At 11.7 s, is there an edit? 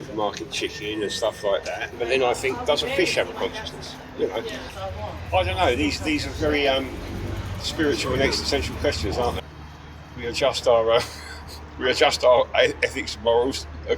no; 3 cuts; at 1.9 s, 4.6 s, 9.4 s

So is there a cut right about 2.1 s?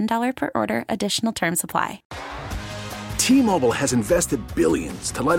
yes; 1 cut; at 2.1 s

